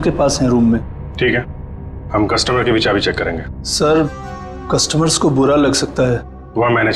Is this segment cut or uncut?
uncut